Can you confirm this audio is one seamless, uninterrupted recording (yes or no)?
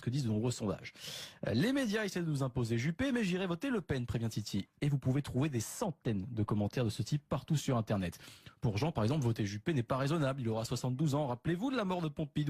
no